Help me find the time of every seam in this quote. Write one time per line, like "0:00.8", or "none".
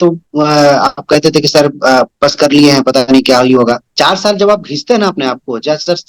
0:03.9